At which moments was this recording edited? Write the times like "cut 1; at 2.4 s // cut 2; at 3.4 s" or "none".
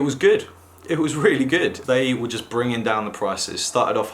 cut 1; at 1.8 s